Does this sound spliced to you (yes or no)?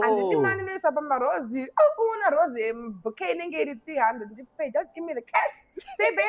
no